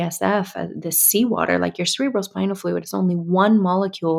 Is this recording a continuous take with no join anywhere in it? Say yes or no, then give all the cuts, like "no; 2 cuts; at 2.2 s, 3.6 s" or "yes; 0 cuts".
yes; 0 cuts